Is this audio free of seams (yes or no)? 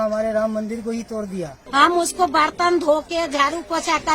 no